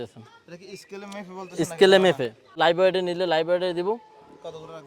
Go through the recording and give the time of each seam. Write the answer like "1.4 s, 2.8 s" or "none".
2.4 s